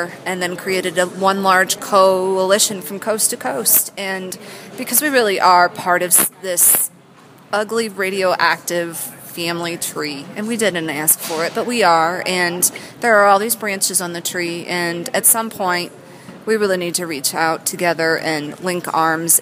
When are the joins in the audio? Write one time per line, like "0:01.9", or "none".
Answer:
none